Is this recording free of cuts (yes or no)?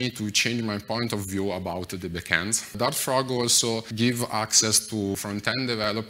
no